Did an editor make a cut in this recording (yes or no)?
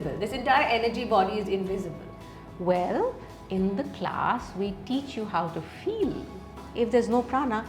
yes